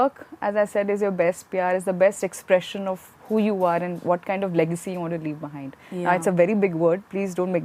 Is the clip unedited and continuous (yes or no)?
yes